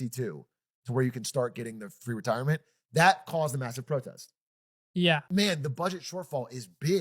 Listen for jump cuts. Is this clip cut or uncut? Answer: cut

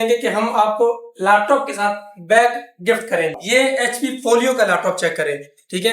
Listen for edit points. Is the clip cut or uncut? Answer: cut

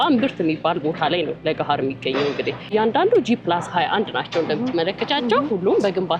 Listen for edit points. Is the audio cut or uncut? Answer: cut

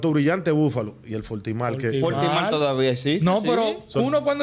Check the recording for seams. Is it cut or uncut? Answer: uncut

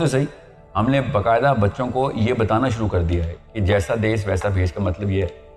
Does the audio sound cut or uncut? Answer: uncut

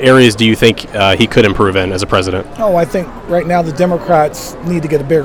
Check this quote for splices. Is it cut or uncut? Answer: uncut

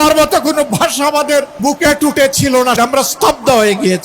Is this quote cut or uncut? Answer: cut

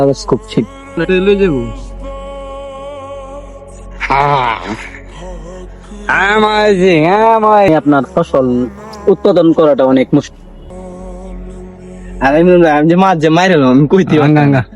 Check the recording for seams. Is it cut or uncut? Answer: cut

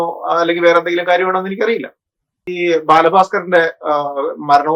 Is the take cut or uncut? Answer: cut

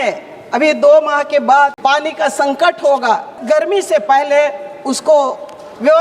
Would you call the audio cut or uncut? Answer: cut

